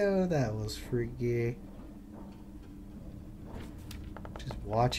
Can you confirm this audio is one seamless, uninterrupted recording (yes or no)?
yes